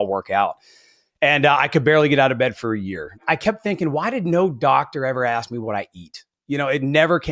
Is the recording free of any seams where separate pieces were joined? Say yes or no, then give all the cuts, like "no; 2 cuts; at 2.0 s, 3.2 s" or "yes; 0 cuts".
no; 1 cut; at 3.2 s